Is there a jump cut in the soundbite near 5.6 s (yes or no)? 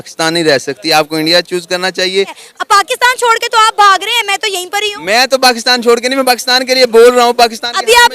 no